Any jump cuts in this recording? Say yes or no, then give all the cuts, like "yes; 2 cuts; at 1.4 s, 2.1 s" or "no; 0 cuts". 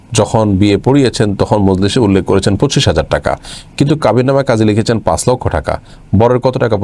no; 0 cuts